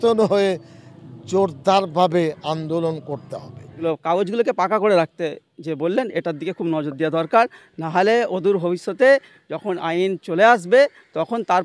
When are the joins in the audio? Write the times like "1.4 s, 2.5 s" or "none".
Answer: 3.6 s